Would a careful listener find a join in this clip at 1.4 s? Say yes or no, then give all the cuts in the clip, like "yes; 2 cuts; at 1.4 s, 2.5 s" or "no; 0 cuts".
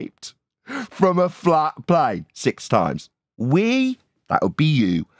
no; 1 cut; at 3.3 s